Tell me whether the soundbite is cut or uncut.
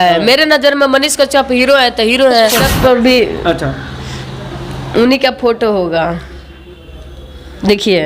cut